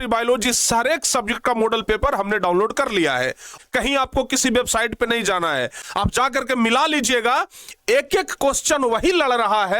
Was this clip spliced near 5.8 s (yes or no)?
yes